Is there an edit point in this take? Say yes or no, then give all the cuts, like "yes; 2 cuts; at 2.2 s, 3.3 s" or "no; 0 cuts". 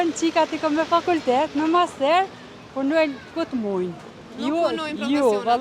no; 0 cuts